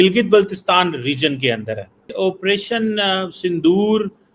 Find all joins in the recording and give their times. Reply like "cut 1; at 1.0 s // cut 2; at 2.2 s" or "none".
cut 1; at 2.0 s